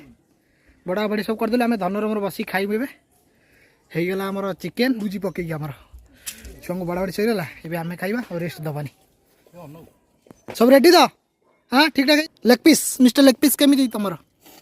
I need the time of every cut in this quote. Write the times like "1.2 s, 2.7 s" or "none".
5.0 s, 12.2 s